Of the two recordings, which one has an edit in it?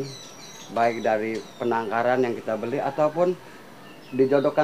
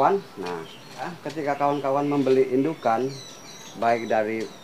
second; 1 cut; at 1.2 s

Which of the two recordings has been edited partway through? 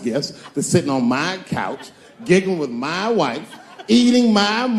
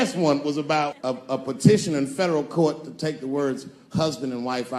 second; 1 cut; at 1.0 s

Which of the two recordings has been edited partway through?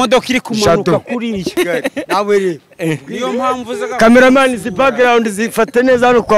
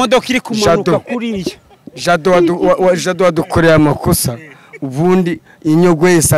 first; 1 cut; at 1.5 s

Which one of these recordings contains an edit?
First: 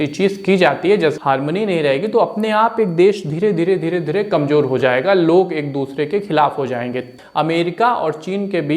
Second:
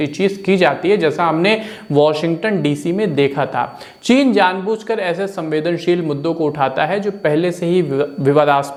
first; 2 cuts; at 1.2 s, 7.1 s

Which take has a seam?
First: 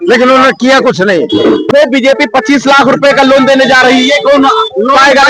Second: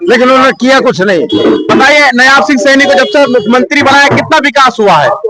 first; 1 cut; at 1.7 s

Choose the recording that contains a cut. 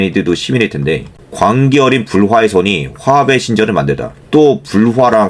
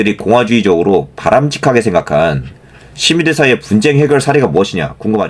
first; 2 cuts; at 1.2 s, 4.1 s

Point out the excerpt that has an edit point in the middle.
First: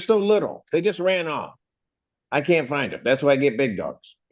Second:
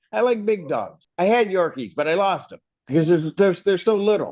second; 1 cut; at 1.0 s

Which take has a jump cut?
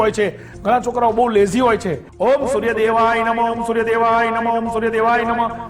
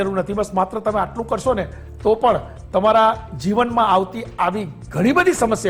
first; 1 cut; at 2.0 s

